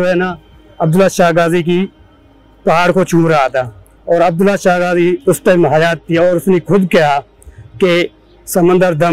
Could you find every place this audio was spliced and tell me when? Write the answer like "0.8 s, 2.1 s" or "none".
none